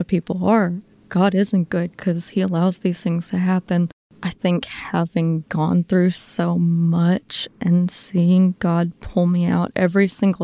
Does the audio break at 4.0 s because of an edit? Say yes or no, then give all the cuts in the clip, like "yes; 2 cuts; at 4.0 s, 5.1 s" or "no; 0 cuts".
yes; 1 cut; at 4.0 s